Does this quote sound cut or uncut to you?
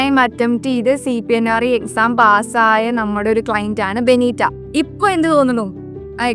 cut